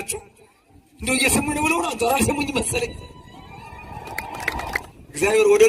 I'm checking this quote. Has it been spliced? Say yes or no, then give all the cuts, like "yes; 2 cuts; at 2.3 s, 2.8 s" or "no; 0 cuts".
yes; 1 cut; at 4.8 s